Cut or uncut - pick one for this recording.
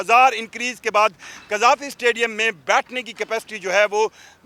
uncut